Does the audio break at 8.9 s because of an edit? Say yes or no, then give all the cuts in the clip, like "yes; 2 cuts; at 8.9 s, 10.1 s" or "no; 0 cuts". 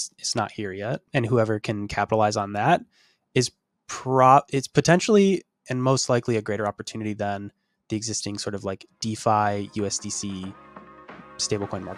no; 1 cut; at 1.1 s